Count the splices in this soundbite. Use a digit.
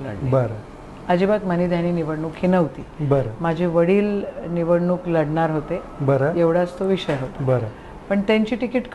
0